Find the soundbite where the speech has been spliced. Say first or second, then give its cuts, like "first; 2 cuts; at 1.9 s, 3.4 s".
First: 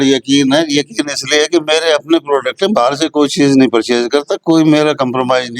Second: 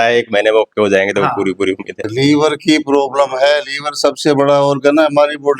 second; 1 cut; at 2.0 s